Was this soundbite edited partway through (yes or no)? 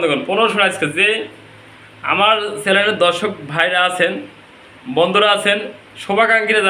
no